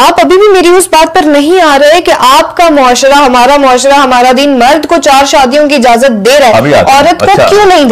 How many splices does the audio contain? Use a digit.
0